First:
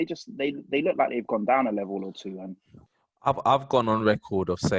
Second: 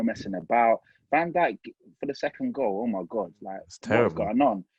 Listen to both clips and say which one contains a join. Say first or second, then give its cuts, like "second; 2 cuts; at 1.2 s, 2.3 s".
first; 1 cut; at 2.7 s